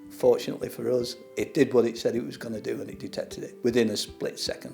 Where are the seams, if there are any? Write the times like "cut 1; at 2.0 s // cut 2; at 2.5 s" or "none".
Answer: cut 1; at 3.4 s